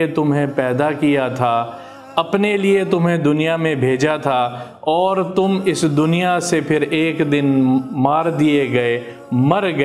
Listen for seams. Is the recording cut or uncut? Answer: uncut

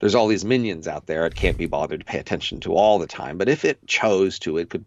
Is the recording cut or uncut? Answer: uncut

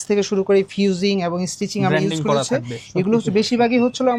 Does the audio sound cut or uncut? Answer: uncut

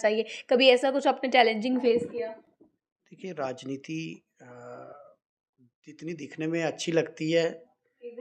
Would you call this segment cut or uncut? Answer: uncut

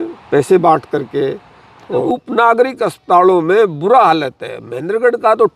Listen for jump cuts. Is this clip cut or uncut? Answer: cut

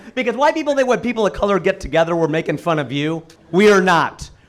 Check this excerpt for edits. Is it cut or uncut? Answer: cut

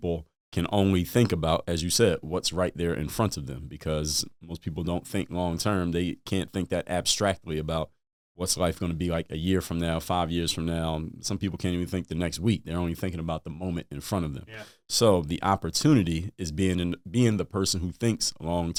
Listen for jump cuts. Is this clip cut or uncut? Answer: uncut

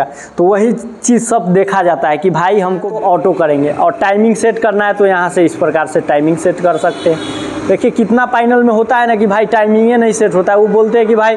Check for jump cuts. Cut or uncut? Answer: cut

